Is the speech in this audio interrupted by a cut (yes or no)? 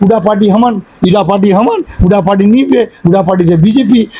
no